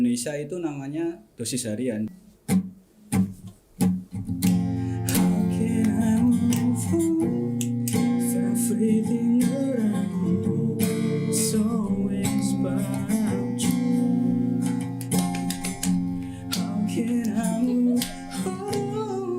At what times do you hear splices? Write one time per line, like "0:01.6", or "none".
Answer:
0:02.1